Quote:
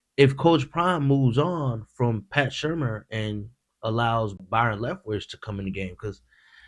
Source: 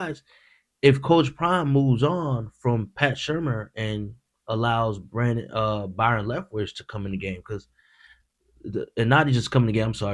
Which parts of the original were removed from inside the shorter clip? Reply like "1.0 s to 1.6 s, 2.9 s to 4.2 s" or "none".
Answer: 5.1 s to 5.9 s

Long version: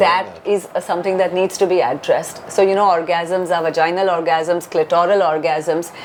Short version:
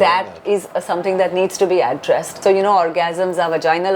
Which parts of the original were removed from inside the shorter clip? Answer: 2.3 s to 2.4 s

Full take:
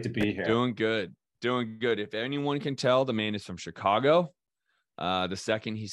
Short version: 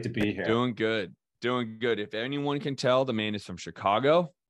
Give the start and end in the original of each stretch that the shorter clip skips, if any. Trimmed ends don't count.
none

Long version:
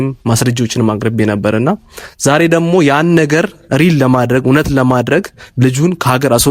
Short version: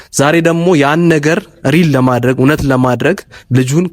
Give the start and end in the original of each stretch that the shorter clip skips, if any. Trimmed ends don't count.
none

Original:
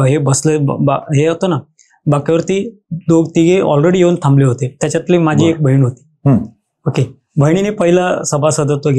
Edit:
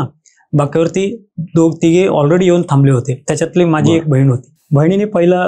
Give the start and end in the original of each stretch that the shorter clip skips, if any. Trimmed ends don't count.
6.1 s to 7.2 s

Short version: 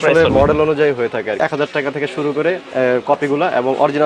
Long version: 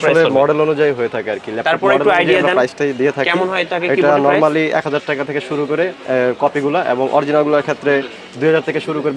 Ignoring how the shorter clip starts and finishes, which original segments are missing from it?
1.4 s to 4.7 s

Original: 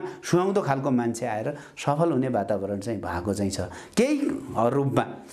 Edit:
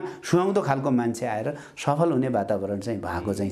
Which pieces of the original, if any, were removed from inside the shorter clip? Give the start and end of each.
none

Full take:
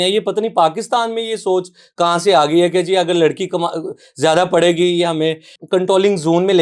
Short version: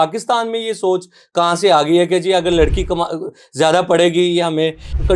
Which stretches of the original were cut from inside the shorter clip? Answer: none

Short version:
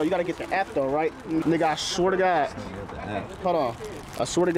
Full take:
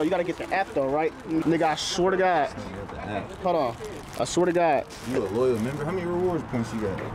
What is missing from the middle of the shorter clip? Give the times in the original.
none

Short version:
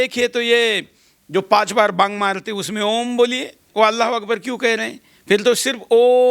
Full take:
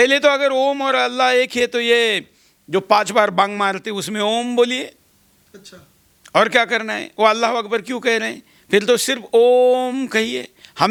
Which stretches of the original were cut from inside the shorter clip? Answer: 5.0 s to 7.0 s

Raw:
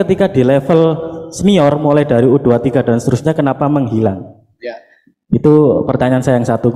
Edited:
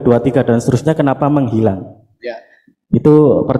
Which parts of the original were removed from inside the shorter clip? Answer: none

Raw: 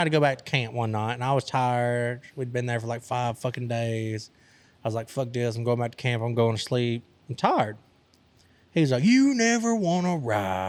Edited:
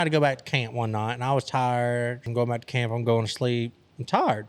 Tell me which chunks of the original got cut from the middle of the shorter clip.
2.3 s to 5.6 s

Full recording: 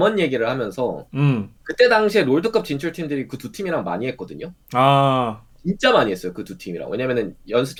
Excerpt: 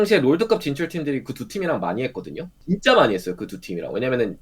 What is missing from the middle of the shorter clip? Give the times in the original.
4.5 s to 5.5 s

